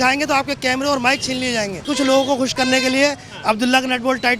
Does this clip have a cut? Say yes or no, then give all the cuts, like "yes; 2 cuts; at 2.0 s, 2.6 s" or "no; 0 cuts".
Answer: yes; 1 cut; at 1.9 s